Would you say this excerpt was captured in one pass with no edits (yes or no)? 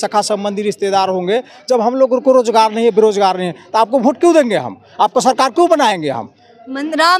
yes